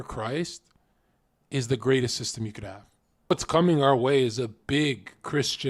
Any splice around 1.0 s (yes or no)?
no